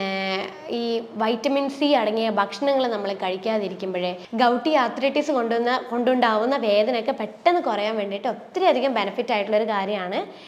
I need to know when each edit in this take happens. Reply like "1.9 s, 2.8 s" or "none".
4.2 s